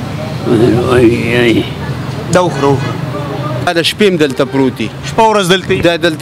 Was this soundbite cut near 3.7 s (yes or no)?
yes